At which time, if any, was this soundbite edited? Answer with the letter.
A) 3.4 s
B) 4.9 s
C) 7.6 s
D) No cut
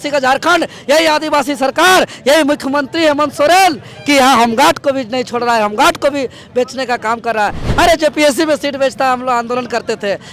C